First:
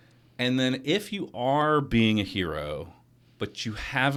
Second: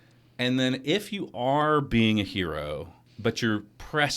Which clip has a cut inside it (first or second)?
second